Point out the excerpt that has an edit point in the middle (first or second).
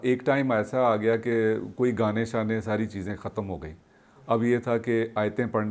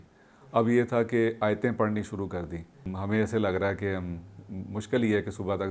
second